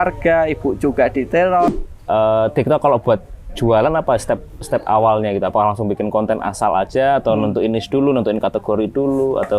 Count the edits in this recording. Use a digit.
1